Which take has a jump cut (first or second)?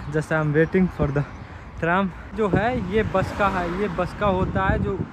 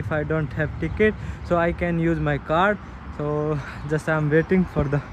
first